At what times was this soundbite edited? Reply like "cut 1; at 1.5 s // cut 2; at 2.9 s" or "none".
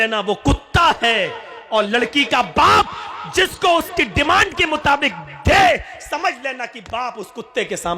none